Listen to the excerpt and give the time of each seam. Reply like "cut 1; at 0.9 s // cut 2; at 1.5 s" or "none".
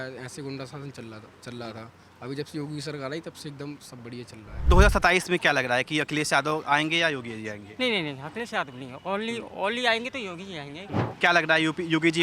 cut 1; at 4.7 s // cut 2; at 11.1 s

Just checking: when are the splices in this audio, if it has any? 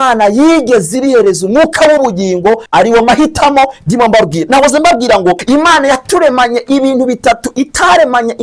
cut 1; at 2.6 s // cut 2; at 5.4 s

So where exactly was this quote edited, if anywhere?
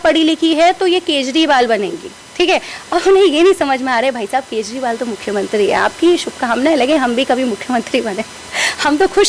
none

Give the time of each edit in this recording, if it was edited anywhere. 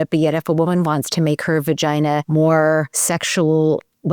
cut 1; at 2.3 s // cut 2; at 3.0 s

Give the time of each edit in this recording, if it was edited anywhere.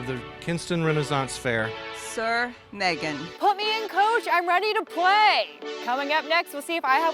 cut 1; at 3.3 s // cut 2; at 5.7 s

